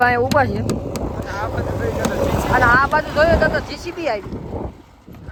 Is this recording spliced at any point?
no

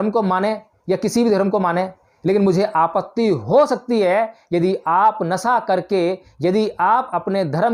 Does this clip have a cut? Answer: no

